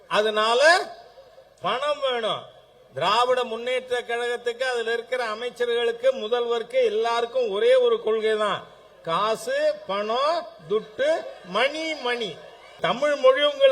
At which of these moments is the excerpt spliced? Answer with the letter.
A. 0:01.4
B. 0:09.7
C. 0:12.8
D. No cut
C